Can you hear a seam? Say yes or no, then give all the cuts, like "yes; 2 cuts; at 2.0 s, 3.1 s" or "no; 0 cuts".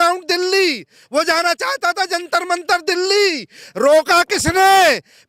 no; 0 cuts